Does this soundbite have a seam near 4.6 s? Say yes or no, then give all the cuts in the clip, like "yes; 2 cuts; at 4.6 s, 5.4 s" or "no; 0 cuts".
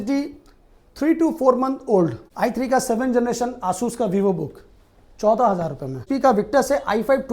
no; 2 cuts; at 2.2 s, 6.0 s